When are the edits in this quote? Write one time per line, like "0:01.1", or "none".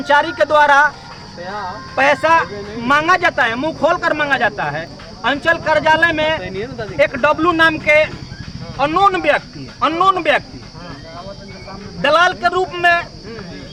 none